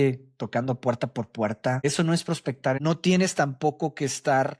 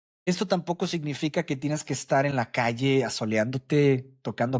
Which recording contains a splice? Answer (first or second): first